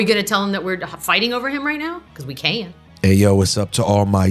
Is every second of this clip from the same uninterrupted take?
no; 1 cut; at 2.8 s

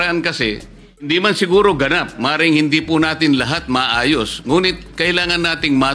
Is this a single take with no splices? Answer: no; 1 cut; at 1.1 s

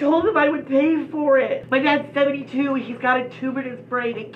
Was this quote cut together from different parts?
yes; 1 cut; at 1.6 s

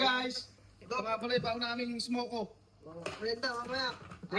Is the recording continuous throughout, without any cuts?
yes; 0 cuts

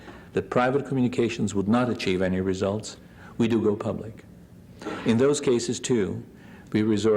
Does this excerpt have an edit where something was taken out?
yes; 1 cut; at 1.6 s

